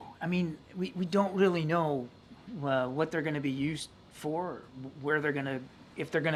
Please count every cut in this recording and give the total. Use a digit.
0